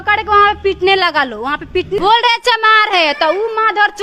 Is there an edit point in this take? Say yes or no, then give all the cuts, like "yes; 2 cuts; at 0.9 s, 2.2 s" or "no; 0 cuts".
yes; 1 cut; at 2.0 s